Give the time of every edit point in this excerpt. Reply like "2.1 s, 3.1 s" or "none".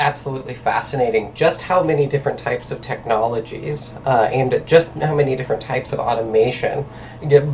none